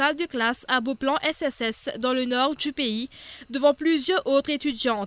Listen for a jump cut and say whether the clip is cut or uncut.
uncut